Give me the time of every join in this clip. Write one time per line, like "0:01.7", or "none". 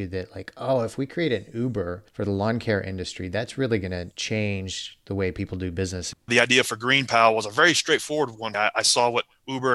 0:02.0
0:04.1
0:06.3
0:08.4